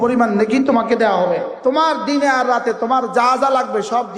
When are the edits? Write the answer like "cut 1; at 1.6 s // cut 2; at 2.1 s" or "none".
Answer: cut 1; at 1.5 s

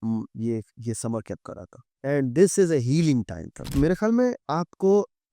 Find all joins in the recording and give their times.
cut 1; at 3.7 s

